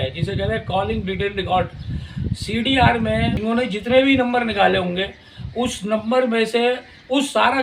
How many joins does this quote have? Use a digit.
1